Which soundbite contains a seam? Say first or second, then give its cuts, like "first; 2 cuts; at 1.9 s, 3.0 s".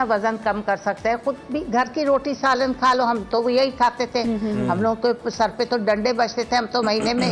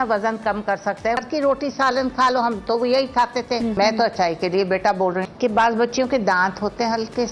second; 3 cuts; at 1.2 s, 3.7 s, 5.3 s